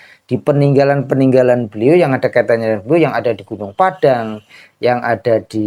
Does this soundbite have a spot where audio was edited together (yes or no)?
no